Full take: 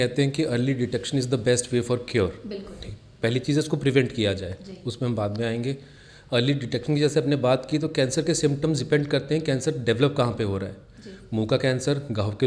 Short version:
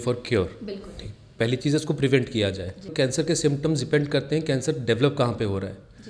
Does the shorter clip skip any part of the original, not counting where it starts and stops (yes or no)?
yes